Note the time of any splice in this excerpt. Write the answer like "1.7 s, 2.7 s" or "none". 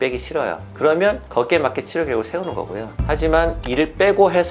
1.2 s, 2.9 s